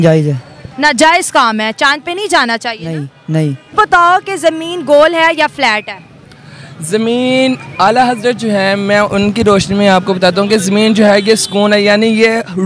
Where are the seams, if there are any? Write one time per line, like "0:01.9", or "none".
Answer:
0:03.8

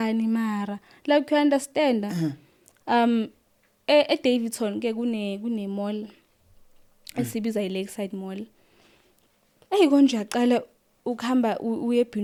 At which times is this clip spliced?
none

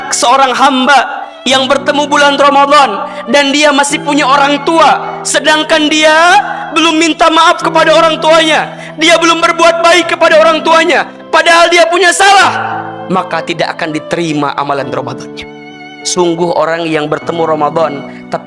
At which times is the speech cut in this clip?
0:15.7

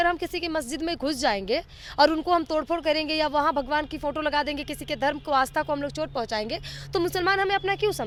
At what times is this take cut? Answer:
none

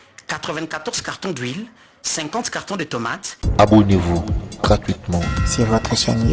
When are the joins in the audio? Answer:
0:03.4

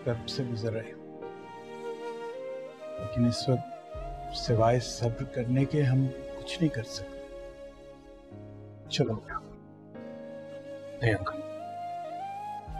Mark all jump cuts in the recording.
none

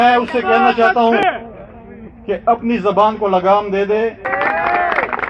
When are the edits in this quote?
0:01.2
0:04.3

